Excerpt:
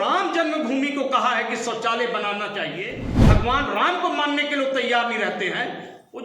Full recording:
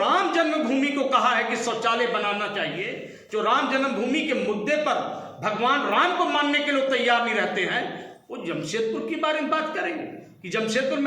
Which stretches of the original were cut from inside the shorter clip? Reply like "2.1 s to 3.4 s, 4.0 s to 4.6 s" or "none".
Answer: 3.1 s to 5.3 s